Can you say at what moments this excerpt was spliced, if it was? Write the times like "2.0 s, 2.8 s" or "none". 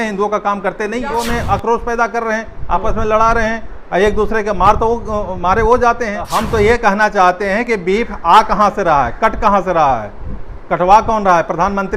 1.1 s, 6.3 s